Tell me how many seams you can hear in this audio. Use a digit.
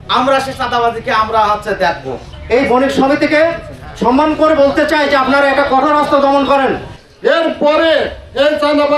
2